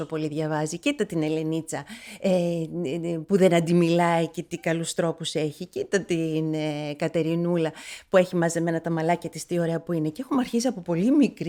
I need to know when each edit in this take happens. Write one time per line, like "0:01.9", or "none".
none